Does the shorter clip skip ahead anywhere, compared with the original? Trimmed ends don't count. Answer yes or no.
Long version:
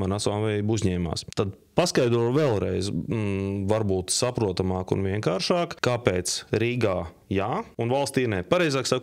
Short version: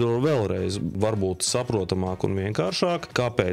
yes